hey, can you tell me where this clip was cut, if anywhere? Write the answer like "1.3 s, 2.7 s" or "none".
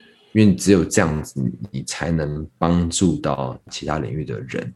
3.7 s